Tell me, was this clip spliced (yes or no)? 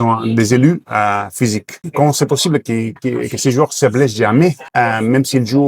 yes